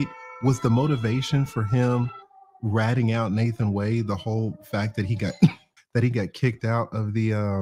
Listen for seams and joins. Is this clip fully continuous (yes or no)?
no